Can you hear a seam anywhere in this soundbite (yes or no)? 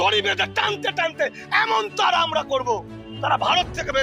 no